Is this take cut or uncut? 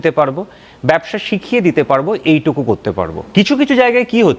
cut